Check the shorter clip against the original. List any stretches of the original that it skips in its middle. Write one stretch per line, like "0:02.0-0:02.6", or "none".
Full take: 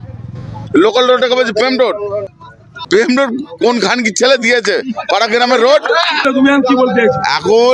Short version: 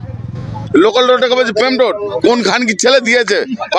0:02.1-0:03.5

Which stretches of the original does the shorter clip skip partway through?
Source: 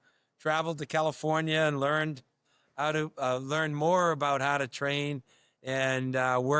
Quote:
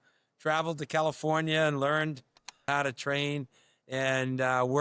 0:02.7-0:04.4

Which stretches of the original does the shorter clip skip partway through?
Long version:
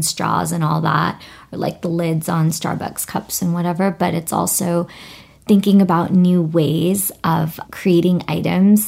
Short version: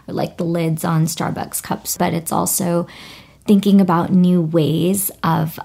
0:03.4-0:03.9

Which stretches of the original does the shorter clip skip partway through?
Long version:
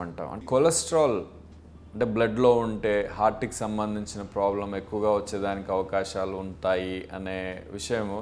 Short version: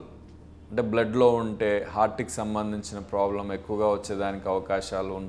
none

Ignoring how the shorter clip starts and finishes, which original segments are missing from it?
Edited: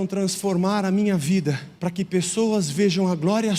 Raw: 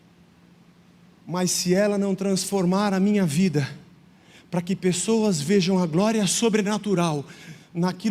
0:03.8-0:04.4

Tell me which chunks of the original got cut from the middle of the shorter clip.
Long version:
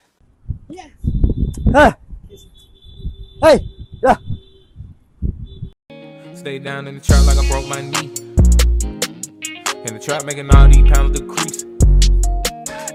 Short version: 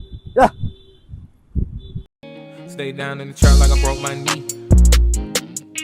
none

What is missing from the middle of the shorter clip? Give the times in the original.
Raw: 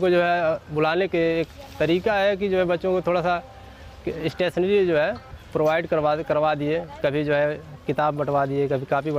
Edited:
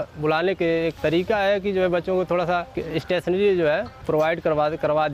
0:01.5-0:01.7
0:03.5-0:04.1
0:05.2-0:05.4

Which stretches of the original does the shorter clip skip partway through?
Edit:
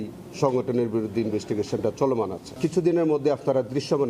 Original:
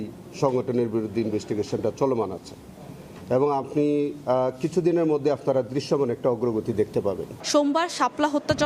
0:02.5-0:04.5

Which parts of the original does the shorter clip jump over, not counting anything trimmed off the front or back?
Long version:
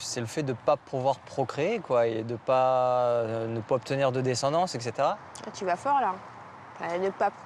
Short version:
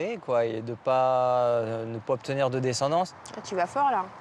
0:04.8-0:05.3

